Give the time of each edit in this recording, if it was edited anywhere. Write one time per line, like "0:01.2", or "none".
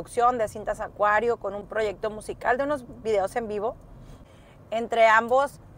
0:01.6
0:04.1